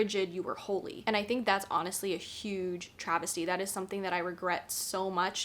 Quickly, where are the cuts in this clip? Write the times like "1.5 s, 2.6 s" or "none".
1.0 s

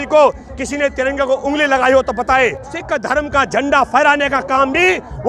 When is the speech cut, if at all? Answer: 2.8 s

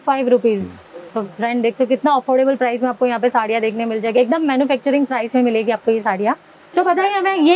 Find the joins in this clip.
none

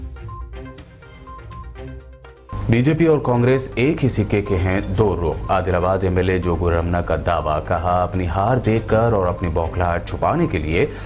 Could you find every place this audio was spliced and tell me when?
none

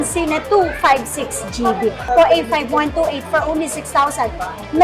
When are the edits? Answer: 2.1 s

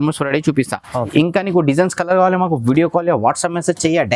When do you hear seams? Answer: 1.1 s

